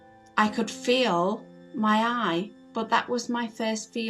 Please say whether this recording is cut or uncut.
cut